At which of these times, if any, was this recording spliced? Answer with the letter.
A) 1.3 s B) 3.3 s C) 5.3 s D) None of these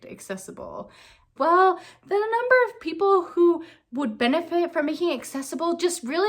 A